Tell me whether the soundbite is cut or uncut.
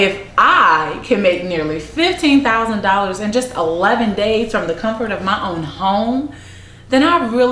uncut